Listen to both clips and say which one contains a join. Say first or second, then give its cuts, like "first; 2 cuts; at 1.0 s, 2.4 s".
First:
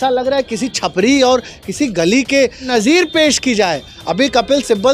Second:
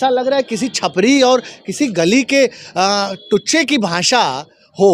first; 1 cut; at 2.7 s